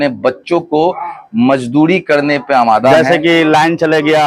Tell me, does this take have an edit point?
yes; 1 cut; at 2.9 s

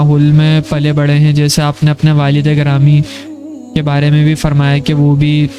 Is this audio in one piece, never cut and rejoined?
yes; 0 cuts

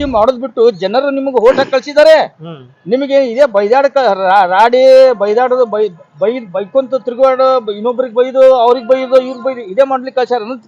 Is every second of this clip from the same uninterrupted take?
yes; 0 cuts

